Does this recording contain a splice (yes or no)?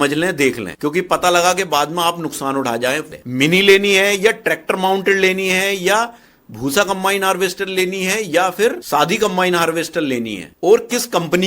yes